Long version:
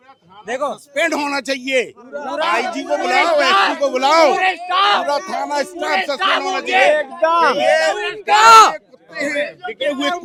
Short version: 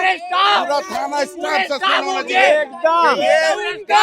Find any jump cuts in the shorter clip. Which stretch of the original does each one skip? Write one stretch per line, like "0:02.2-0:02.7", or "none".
none